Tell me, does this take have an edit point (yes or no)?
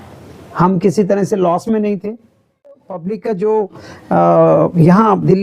yes